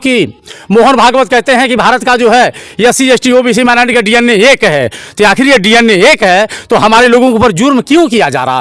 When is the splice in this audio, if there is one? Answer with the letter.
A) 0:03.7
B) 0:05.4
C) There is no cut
C